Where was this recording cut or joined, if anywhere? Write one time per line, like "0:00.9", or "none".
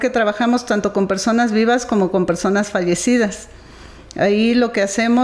none